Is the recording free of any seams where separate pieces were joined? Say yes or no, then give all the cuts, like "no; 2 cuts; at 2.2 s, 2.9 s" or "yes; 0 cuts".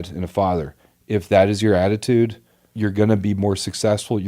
no; 1 cut; at 2.7 s